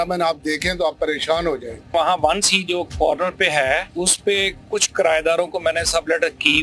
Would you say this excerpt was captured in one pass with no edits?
yes; 0 cuts

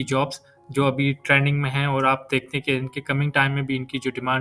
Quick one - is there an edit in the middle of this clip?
no; 0 cuts

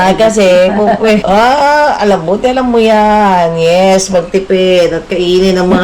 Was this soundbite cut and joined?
yes; 1 cut; at 1.2 s

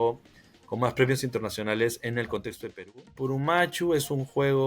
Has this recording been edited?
yes; 1 cut; at 3.2 s

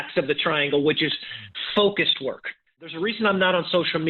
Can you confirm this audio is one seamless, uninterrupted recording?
no; 1 cut; at 2.9 s

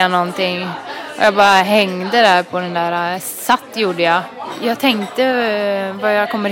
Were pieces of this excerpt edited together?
yes; 1 cut; at 4.4 s

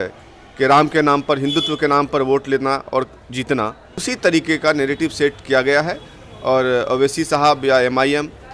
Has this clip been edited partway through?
yes; 1 cut; at 4.1 s

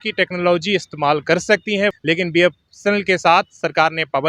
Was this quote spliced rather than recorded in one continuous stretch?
yes; 1 cut; at 2.0 s

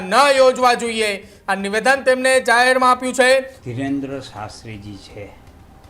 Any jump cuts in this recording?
yes; 1 cut; at 3.6 s

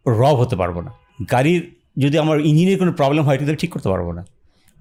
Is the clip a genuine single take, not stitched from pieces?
yes; 0 cuts

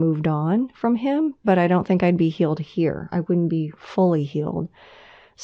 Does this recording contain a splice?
no; 0 cuts

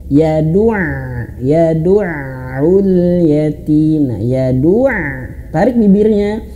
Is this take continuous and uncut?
yes; 0 cuts

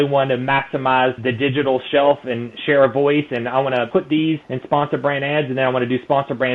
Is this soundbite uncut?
no; 1 cut; at 3.9 s

